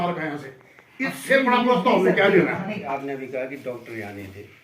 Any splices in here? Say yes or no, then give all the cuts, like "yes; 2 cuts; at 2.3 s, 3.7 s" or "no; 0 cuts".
yes; 1 cut; at 2.9 s